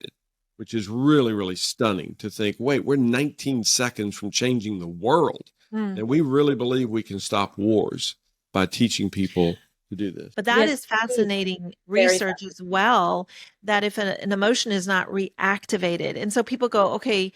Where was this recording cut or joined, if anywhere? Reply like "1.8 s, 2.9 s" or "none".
8.5 s, 10.2 s

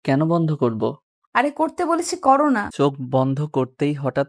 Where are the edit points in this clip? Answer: 2.7 s

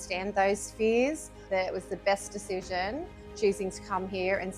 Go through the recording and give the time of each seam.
1.4 s

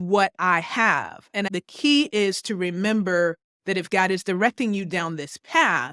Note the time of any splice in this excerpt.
1.5 s

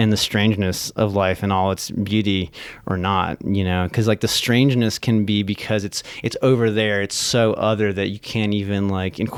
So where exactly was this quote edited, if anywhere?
none

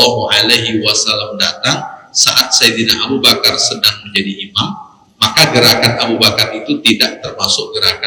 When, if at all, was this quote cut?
none

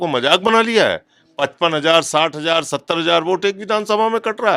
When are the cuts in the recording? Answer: none

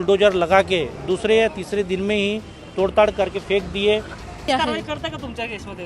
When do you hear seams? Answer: 4.3 s

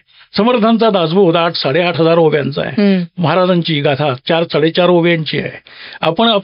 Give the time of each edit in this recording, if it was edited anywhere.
none

